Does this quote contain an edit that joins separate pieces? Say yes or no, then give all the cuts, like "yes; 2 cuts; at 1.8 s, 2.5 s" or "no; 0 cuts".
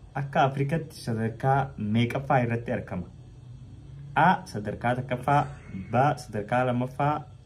no; 0 cuts